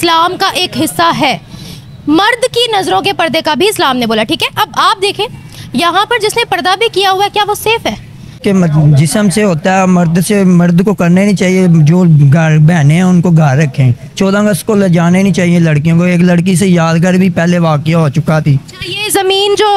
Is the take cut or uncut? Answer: cut